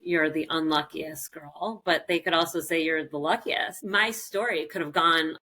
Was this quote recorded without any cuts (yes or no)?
no